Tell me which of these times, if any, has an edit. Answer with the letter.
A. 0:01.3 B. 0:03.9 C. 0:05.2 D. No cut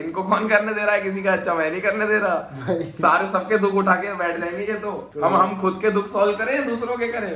D